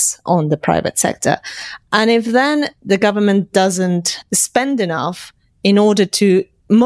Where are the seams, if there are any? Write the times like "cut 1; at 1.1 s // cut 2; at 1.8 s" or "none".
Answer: none